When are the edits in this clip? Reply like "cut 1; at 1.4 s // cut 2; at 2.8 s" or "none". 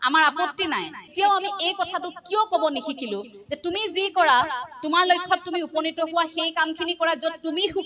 cut 1; at 1.1 s